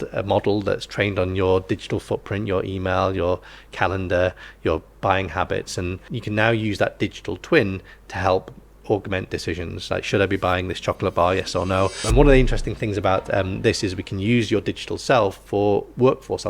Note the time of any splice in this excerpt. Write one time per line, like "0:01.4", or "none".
0:06.1
0:12.0